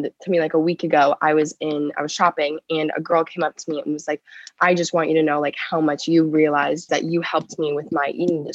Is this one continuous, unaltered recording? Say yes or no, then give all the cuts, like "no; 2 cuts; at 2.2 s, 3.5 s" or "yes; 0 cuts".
no; 1 cut; at 6.9 s